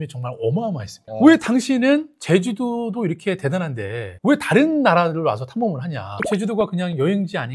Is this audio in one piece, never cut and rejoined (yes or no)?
no